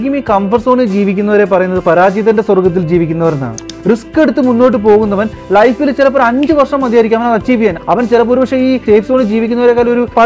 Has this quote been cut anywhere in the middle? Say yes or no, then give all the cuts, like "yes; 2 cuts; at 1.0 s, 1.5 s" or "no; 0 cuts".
yes; 3 cuts; at 3.7 s, 7.8 s, 8.8 s